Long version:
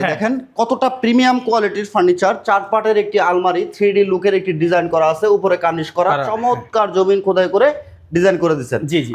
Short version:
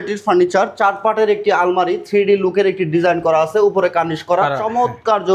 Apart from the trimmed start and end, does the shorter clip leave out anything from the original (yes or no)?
no